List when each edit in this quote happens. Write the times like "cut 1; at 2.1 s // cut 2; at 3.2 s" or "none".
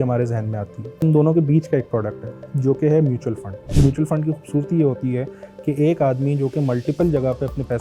cut 1; at 1.0 s // cut 2; at 3.7 s